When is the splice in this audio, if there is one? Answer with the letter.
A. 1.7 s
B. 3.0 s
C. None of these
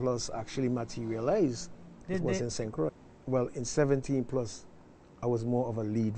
B